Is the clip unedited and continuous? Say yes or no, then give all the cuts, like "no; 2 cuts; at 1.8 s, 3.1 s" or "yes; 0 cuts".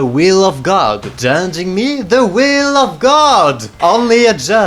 yes; 0 cuts